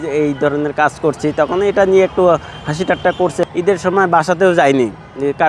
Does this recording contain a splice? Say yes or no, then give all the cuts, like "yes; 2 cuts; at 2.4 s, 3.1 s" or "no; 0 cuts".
yes; 1 cut; at 3.5 s